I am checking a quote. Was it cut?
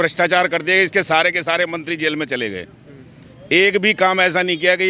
no; 0 cuts

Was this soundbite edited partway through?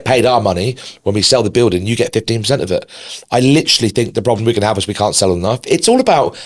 no; 0 cuts

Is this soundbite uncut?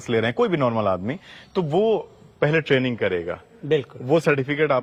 yes; 0 cuts

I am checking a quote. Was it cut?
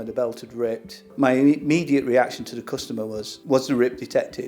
yes; 1 cut; at 3.3 s

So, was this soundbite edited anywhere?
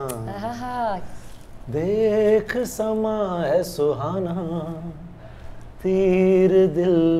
no; 0 cuts

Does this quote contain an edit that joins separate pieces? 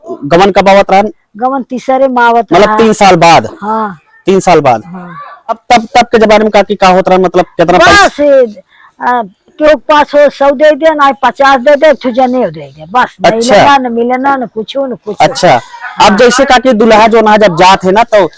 yes; 1 cut; at 5.6 s

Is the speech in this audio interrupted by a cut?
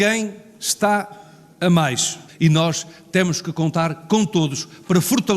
yes; 1 cut; at 2.2 s

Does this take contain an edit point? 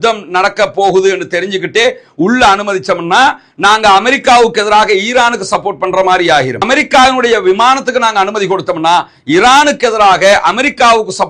no; 0 cuts

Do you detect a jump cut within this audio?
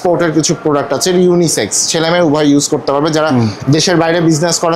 no; 0 cuts

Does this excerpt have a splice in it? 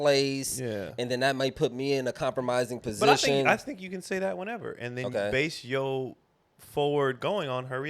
no; 0 cuts

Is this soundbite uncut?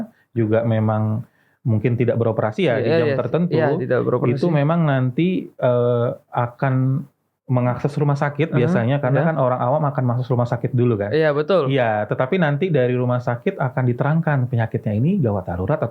yes; 0 cuts

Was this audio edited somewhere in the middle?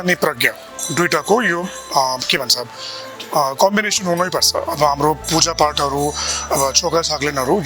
no; 0 cuts

